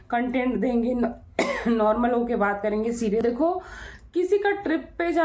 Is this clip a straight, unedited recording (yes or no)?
no